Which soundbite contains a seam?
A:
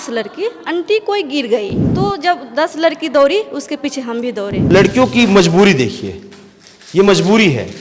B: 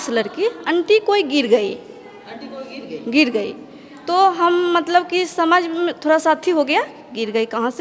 A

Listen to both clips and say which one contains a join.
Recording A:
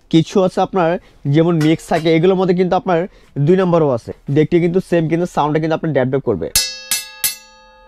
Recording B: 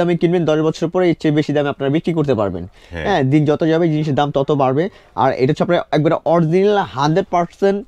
A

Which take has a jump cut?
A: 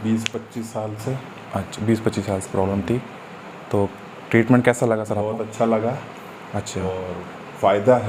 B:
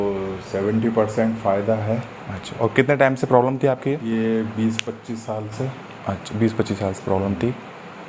B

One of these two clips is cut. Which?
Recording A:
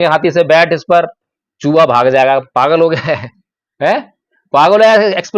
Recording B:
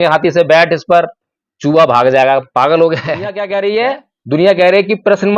B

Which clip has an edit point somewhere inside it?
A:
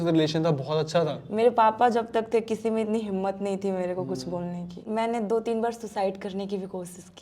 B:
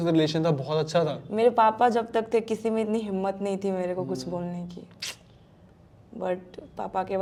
A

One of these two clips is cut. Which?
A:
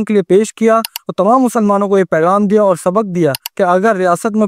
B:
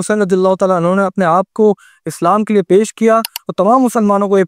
A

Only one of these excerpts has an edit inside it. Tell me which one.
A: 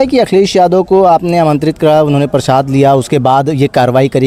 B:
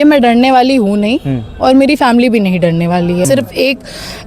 B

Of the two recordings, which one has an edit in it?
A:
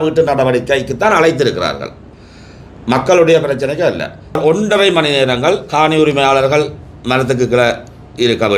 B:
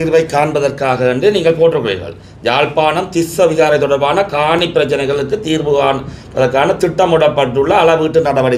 A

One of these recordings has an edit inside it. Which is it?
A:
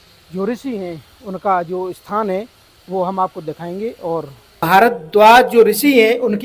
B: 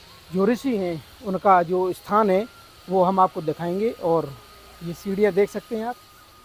A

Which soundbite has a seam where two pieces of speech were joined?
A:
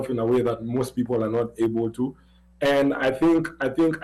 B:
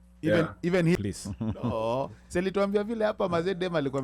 B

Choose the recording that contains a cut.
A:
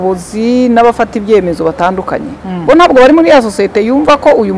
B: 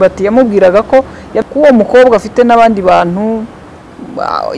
B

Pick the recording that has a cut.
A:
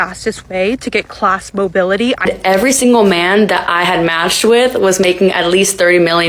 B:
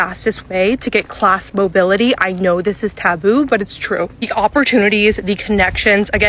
A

